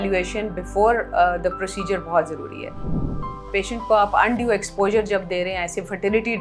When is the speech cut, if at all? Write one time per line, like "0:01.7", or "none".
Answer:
0:03.1